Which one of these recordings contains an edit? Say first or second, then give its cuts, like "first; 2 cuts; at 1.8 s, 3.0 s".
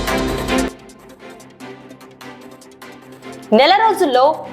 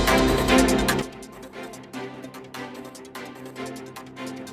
second; 2 cuts; at 1.0 s, 3.5 s